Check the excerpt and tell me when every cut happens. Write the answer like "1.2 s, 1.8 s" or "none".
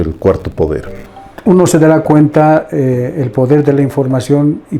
1.0 s